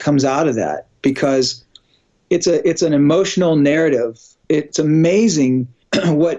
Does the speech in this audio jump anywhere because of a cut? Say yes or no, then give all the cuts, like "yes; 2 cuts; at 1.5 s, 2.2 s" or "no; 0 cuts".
no; 0 cuts